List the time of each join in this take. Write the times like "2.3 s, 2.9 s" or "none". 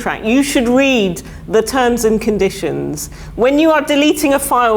none